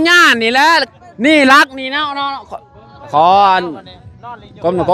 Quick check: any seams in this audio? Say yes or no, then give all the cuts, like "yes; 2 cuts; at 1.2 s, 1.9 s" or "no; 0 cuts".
yes; 2 cuts; at 0.9 s, 3.1 s